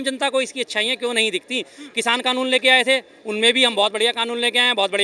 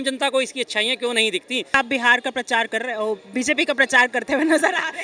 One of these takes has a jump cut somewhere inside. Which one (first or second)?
second